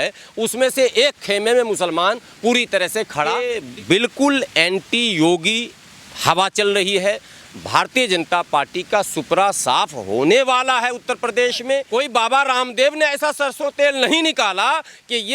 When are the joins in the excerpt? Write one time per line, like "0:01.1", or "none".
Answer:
0:03.5
0:11.9